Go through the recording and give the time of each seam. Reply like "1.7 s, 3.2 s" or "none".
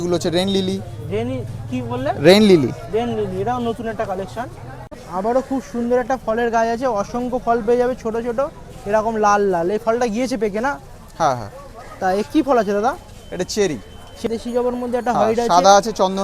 4.9 s, 14.2 s